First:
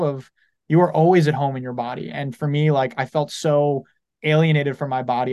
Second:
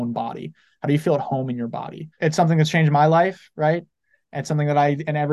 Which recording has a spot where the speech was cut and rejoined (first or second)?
second